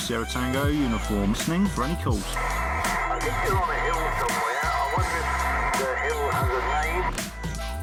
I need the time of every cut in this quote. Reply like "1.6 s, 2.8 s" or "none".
none